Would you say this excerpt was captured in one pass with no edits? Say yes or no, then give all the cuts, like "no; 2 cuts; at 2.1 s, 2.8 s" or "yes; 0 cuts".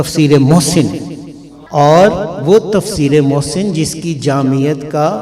yes; 0 cuts